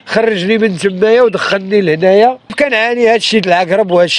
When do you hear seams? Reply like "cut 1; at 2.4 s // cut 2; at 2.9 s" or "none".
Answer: cut 1; at 2.5 s